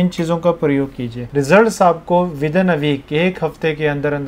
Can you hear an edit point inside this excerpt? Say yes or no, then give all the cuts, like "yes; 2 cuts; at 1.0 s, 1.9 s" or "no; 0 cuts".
no; 0 cuts